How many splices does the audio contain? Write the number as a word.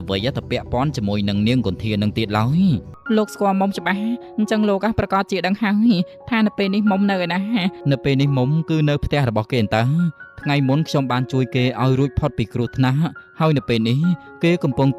two